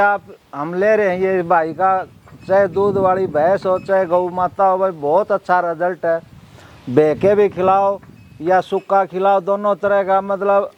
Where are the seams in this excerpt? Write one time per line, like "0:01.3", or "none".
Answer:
none